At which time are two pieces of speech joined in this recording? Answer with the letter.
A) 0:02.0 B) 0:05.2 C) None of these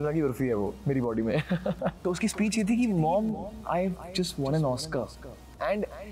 A